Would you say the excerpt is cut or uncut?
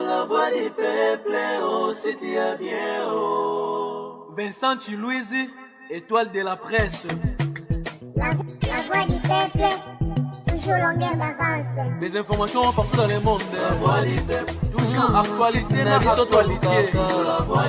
uncut